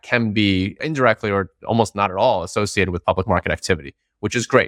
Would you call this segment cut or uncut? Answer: uncut